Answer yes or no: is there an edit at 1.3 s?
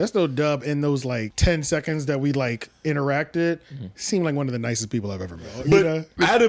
yes